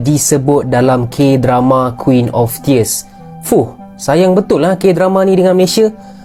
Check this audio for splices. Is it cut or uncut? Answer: uncut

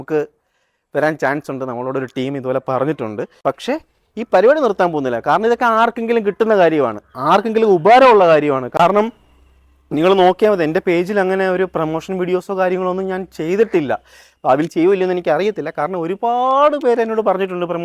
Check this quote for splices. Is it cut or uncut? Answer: cut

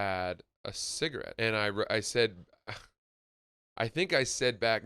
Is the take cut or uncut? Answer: cut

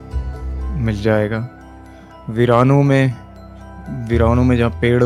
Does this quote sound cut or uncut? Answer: uncut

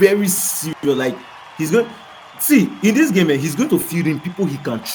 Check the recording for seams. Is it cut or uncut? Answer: uncut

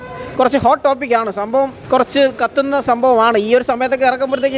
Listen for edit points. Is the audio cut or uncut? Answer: cut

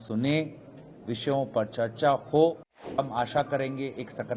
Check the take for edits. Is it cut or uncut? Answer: cut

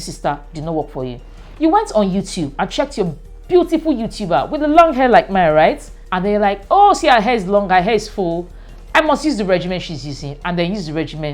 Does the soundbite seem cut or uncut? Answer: uncut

